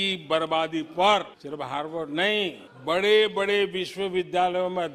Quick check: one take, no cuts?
yes; 0 cuts

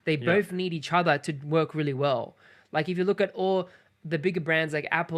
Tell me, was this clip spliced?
no; 0 cuts

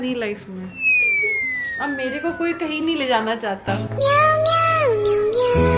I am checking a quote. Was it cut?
no; 0 cuts

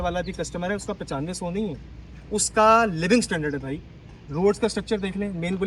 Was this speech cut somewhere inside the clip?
no; 0 cuts

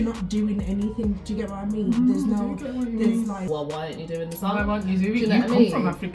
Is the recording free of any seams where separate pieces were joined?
no; 1 cut; at 3.4 s

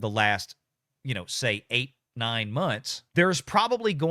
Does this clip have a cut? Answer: yes; 1 cut; at 2.9 s

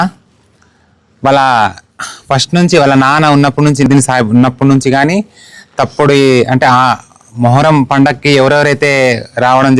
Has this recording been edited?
yes; 1 cut; at 3.9 s

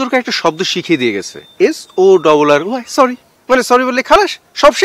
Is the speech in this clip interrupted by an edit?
no; 0 cuts

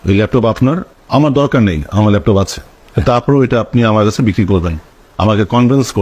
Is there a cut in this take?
yes; 1 cut; at 0.9 s

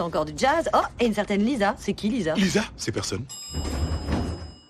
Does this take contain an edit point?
no; 0 cuts

